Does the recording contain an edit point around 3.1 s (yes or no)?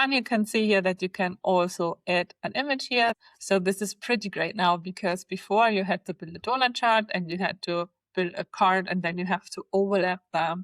yes